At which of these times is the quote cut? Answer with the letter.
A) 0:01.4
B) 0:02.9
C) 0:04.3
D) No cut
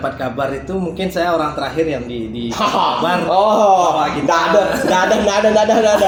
D